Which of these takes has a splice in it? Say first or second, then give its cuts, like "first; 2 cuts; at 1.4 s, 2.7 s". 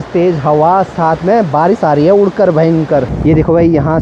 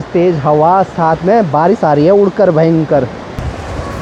first; 1 cut; at 3.1 s